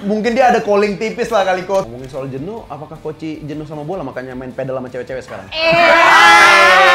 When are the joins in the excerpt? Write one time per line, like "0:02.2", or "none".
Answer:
0:01.9